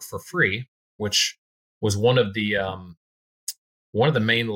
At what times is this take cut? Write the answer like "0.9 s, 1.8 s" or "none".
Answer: none